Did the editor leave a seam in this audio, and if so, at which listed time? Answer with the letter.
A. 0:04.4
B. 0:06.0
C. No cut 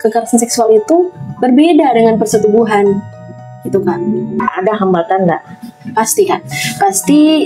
A